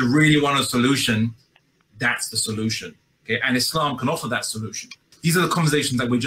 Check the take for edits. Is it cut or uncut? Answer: cut